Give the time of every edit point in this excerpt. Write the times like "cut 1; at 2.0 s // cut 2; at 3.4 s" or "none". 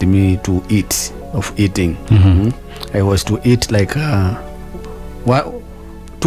none